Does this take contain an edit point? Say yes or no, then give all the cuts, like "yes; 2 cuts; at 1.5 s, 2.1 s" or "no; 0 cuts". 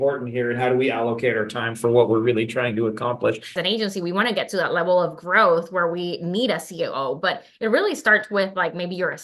yes; 1 cut; at 3.5 s